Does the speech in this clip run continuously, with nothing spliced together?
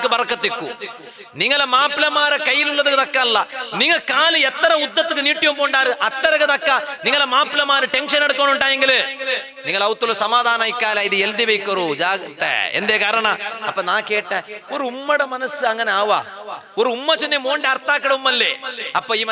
yes; 0 cuts

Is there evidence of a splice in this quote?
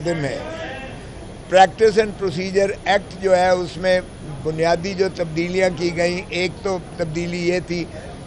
no; 0 cuts

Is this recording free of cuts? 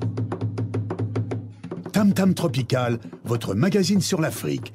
no; 1 cut; at 1.5 s

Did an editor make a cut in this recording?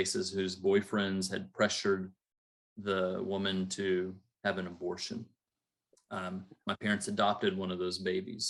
no; 0 cuts

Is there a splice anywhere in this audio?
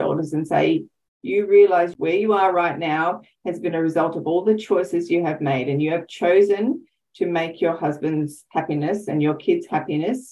yes; 1 cut; at 1.9 s

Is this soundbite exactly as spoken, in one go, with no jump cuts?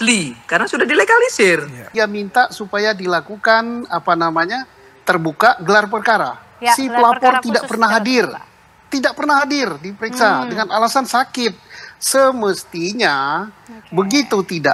no; 1 cut; at 1.8 s

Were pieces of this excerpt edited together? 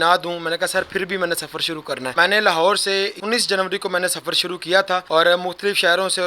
yes; 3 cuts; at 2.1 s, 3.2 s, 5.0 s

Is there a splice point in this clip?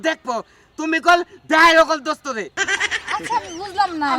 yes; 1 cut; at 2.5 s

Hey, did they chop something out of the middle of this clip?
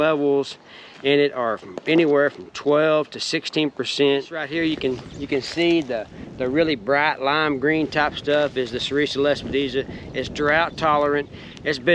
yes; 1 cut; at 4.4 s

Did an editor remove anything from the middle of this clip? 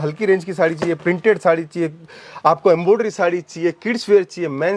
no; 0 cuts

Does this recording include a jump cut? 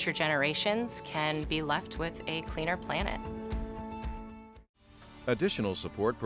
yes; 1 cut; at 5.1 s

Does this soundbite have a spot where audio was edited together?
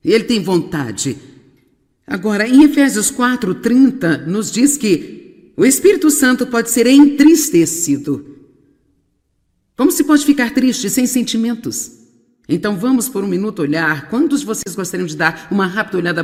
no; 0 cuts

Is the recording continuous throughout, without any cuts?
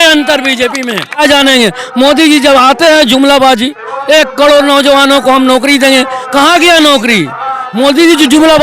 no; 1 cut; at 1.2 s

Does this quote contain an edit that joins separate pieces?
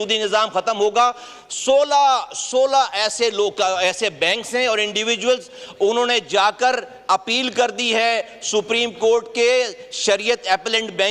no; 0 cuts

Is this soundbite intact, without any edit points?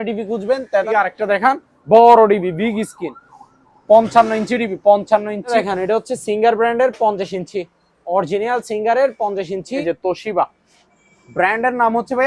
no; 3 cuts; at 0.9 s, 5.5 s, 9.8 s

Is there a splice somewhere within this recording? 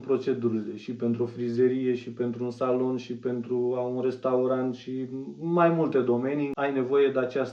yes; 1 cut; at 6.5 s

